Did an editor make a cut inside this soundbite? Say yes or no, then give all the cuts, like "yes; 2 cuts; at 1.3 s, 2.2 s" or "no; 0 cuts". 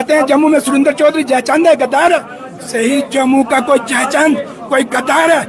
no; 0 cuts